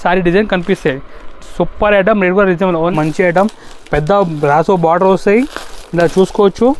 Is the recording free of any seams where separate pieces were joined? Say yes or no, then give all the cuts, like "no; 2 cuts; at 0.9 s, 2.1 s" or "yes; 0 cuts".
no; 1 cut; at 2.9 s